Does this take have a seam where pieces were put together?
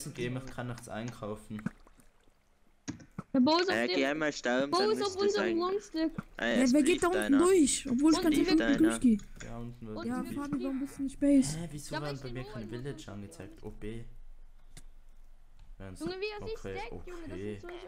yes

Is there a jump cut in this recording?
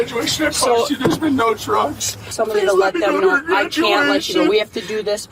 yes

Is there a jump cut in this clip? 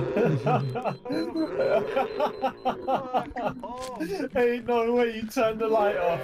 yes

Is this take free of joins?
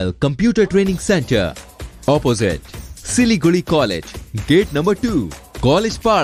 yes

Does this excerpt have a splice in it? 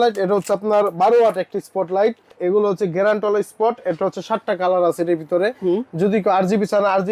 yes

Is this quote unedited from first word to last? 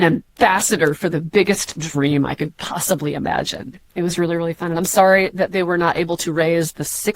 no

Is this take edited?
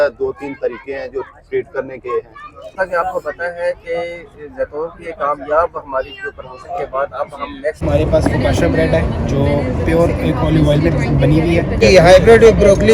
yes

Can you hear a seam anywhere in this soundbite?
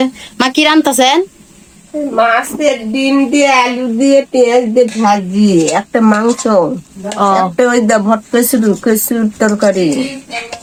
no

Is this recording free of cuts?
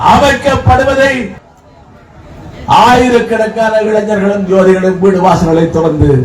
no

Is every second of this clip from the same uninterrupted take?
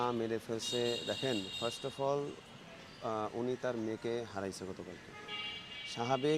yes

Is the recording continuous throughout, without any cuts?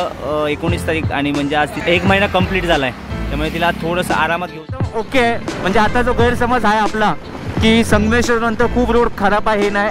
no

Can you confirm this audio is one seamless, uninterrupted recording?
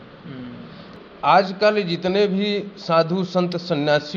no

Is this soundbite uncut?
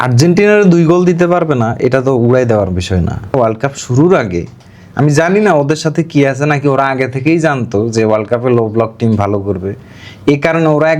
no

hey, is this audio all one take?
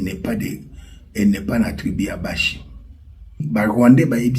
no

